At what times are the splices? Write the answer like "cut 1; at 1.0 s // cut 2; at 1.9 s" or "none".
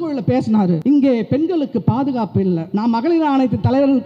cut 1; at 0.8 s // cut 2; at 2.6 s